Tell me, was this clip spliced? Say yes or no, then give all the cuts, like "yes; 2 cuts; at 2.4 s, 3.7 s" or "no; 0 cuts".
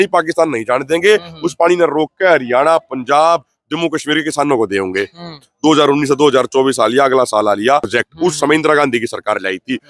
yes; 1 cut; at 7.9 s